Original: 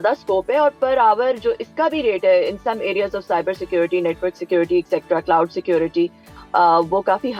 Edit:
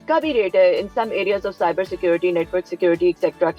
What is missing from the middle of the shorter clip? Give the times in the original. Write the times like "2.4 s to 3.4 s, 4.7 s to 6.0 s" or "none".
none